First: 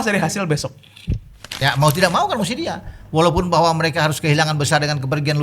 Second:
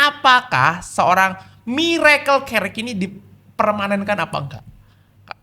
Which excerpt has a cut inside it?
first; 1 cut; at 1.6 s

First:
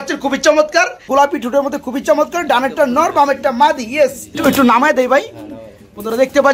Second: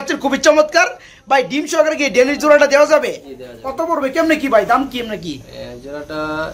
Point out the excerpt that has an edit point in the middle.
first; 2 cuts; at 1.0 s, 4.3 s

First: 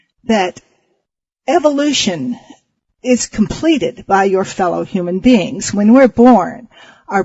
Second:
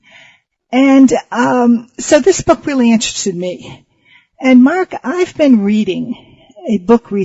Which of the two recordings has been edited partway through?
first; 1 cut; at 1.3 s

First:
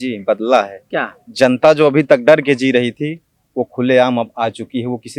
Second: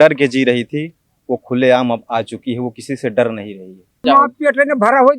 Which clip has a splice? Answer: second; 1 cut; at 4.0 s

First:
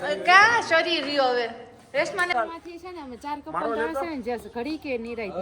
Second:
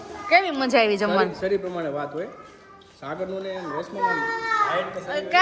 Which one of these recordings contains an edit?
first; 1 cut; at 2.3 s

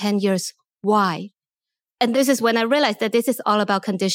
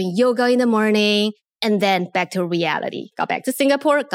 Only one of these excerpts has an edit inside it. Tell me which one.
second; 2 cuts; at 1.5 s, 3.1 s

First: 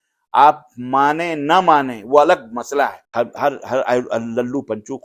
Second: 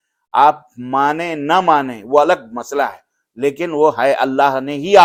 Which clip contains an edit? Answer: first; 1 cut; at 3.0 s

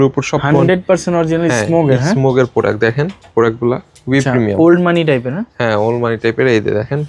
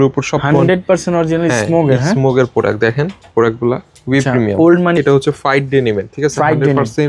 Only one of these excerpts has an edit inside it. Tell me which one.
second; 1 cut; at 4.9 s

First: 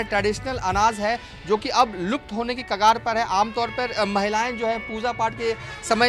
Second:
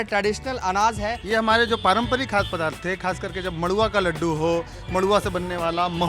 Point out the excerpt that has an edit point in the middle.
second; 1 cut; at 1.2 s

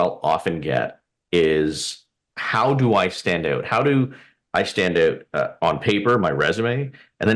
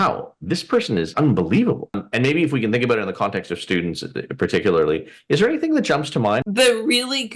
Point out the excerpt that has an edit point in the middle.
second; 3 cuts; at 1.1 s, 2.0 s, 6.4 s

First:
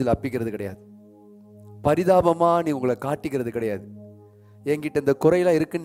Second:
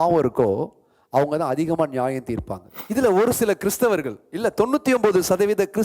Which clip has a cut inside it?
second; 1 cut; at 2.7 s

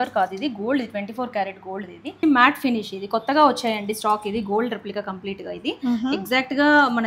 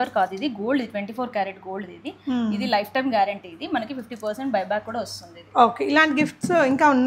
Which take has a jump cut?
first; 1 cut; at 2.2 s

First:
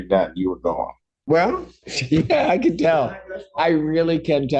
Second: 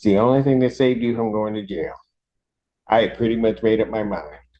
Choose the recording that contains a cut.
first; 1 cut; at 1.2 s

